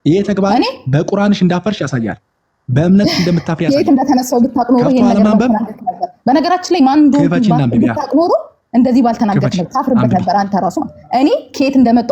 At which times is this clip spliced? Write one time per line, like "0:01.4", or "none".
none